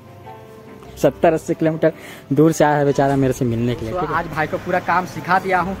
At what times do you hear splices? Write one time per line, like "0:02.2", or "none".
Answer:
0:03.9